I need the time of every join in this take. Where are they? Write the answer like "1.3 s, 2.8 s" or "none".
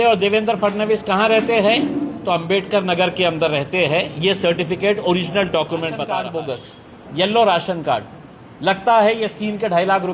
6.3 s